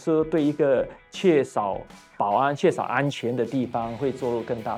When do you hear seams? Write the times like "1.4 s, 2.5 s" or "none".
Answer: none